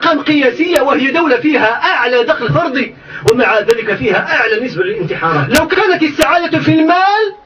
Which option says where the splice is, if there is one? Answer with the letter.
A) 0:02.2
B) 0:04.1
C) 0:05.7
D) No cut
C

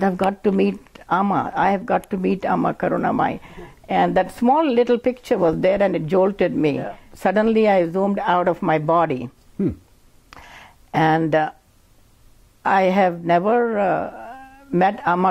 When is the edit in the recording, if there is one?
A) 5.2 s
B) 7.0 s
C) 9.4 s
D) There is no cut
B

